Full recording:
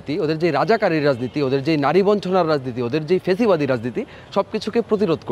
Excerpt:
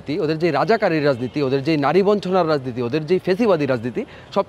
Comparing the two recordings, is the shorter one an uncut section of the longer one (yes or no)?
yes